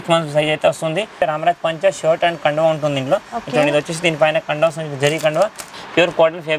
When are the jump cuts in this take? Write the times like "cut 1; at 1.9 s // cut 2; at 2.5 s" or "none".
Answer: cut 1; at 1.2 s // cut 2; at 5.7 s